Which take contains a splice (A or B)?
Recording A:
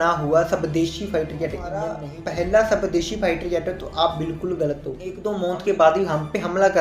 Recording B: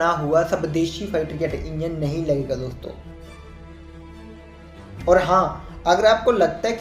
A